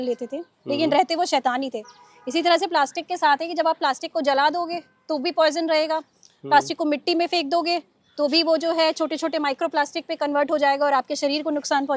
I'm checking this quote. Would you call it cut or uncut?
uncut